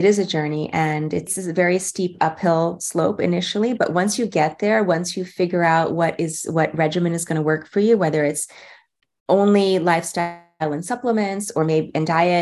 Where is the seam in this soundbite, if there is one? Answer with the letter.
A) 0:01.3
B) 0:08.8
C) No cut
A